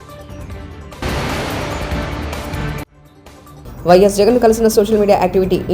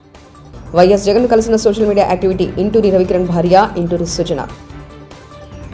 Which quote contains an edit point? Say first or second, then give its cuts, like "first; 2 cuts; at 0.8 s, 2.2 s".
first; 1 cut; at 1.0 s